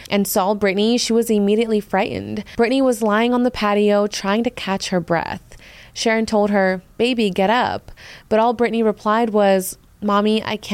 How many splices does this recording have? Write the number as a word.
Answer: one